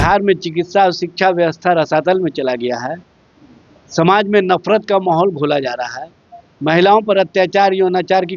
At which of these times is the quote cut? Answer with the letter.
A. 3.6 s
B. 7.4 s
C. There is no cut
C